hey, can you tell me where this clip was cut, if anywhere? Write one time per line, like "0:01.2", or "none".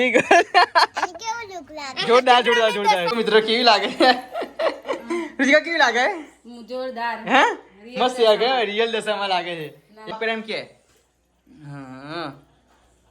0:03.1
0:10.1